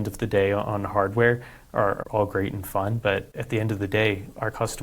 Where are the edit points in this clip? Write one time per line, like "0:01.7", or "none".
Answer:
0:02.0
0:03.3